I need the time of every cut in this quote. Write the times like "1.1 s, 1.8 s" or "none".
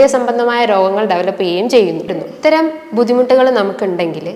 2.3 s